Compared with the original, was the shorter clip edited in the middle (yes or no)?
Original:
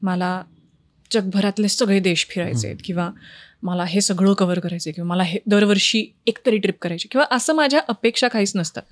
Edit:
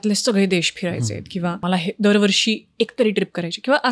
yes